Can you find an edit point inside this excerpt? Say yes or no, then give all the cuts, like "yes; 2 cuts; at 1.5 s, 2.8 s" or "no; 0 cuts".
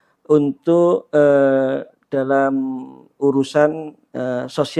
no; 0 cuts